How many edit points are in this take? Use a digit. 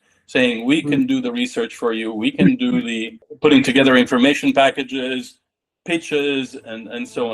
1